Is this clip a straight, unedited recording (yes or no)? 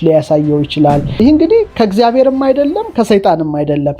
no